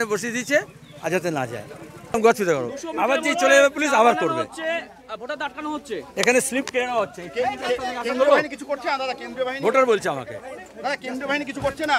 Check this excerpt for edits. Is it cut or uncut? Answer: cut